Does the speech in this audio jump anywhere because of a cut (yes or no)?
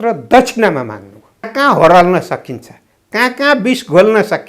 yes